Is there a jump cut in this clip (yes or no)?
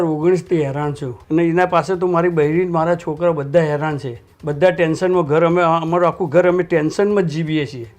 no